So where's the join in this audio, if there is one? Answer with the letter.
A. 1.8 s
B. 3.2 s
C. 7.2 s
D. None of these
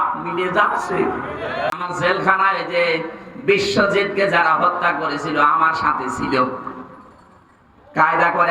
A